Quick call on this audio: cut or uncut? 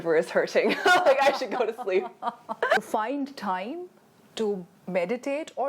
cut